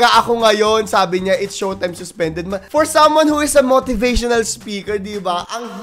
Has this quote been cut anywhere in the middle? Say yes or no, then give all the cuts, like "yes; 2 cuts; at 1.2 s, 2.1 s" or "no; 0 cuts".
no; 0 cuts